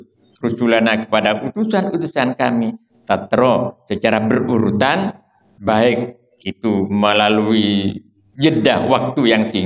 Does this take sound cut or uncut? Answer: uncut